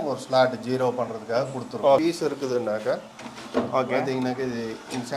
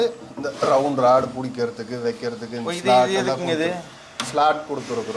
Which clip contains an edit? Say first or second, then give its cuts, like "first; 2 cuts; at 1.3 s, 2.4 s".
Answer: first; 1 cut; at 2.0 s